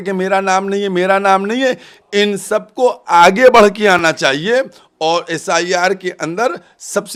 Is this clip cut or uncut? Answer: uncut